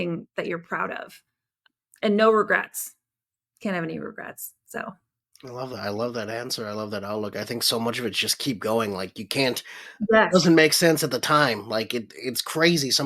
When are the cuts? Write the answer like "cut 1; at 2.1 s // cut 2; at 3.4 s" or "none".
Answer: cut 1; at 1.5 s